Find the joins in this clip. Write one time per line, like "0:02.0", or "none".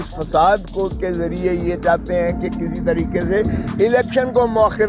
none